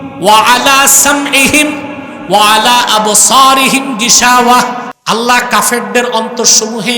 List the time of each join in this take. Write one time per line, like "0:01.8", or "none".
0:04.9